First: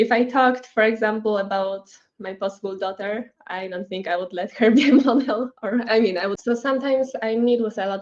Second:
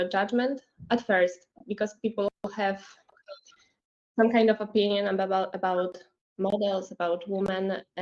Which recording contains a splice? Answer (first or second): first